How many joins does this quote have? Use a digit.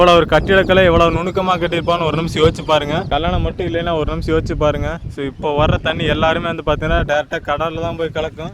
1